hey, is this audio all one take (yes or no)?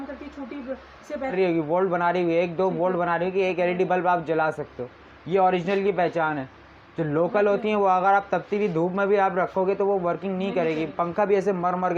no